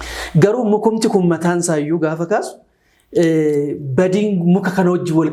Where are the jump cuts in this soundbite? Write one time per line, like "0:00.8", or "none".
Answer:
none